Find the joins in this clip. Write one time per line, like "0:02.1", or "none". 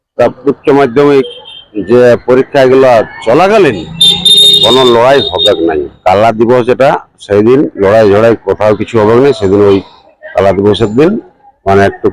0:05.9